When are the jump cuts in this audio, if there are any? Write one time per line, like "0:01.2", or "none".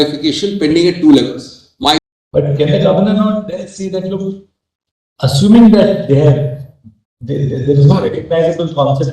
0:02.1